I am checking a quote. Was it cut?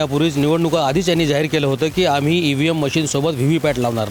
no; 0 cuts

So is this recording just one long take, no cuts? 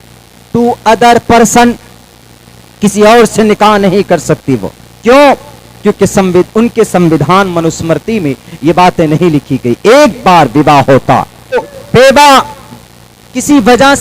no; 1 cut; at 11.6 s

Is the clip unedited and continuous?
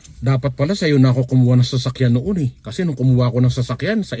yes; 0 cuts

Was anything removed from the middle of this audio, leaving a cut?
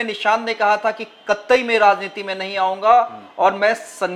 no; 0 cuts

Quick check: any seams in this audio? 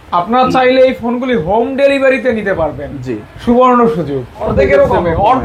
yes; 1 cut; at 4.5 s

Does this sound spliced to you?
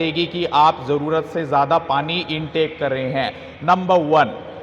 no; 0 cuts

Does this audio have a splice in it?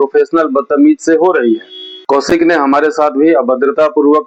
no; 0 cuts

